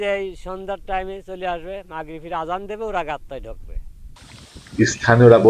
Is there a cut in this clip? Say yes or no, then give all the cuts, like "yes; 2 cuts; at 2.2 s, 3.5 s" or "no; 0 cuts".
no; 0 cuts